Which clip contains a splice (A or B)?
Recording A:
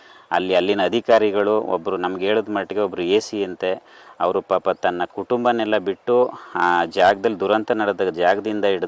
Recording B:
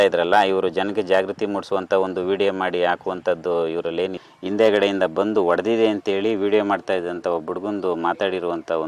B